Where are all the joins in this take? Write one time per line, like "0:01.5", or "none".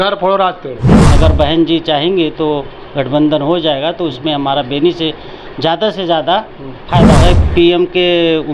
0:01.1
0:07.2